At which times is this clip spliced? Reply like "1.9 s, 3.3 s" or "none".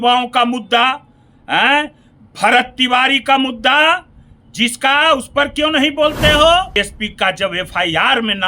6.7 s